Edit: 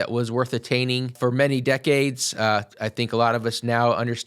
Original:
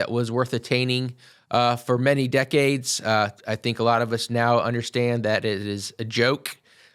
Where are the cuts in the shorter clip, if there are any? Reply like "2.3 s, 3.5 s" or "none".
1.1 s